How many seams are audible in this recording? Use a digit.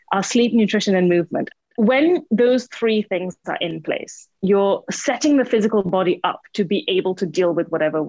1